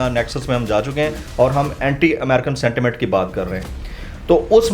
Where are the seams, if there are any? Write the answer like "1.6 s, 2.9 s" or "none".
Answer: none